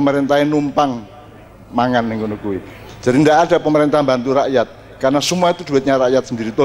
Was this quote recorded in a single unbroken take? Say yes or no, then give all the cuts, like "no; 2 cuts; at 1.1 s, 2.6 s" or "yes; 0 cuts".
yes; 0 cuts